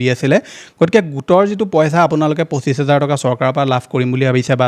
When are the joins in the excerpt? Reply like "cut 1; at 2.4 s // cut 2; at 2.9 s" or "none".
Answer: none